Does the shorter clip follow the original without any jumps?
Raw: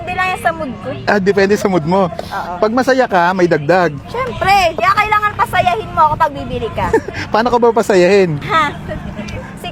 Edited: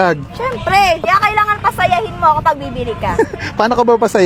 yes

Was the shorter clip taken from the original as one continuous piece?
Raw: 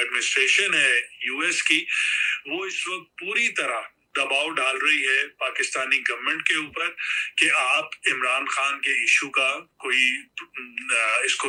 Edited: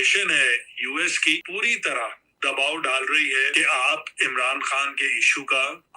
no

